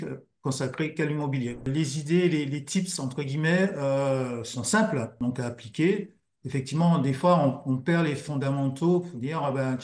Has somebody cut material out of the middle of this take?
yes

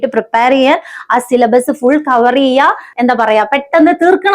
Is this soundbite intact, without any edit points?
no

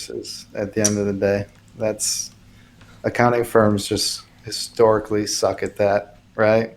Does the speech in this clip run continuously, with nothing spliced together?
yes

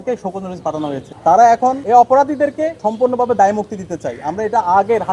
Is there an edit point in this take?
yes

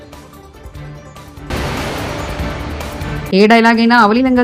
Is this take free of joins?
yes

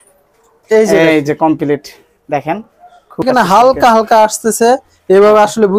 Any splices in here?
yes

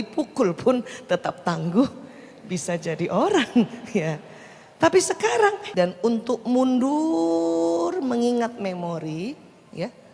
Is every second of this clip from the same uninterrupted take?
no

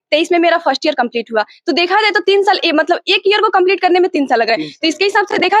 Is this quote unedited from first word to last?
yes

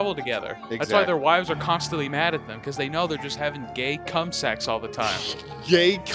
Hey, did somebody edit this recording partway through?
no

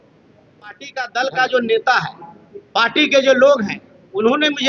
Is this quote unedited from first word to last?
no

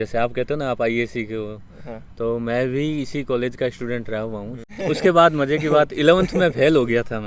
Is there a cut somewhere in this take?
yes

